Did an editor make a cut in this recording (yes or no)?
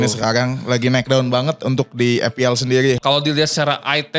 yes